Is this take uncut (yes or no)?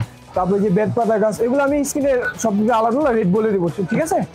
yes